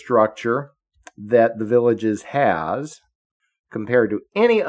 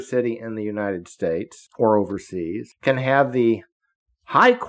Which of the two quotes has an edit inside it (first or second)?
second